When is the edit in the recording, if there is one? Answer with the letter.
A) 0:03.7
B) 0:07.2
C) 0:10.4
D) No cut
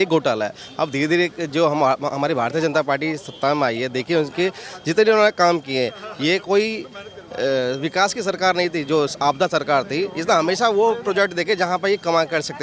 D